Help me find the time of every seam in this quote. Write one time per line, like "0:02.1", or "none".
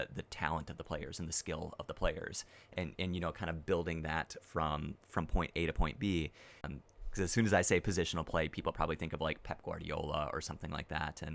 0:06.7